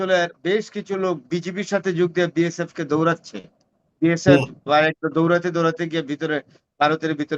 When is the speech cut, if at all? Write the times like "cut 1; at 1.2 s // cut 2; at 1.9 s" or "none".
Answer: cut 1; at 1.2 s